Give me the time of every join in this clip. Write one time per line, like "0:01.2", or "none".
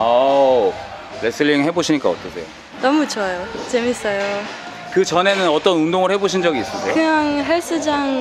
none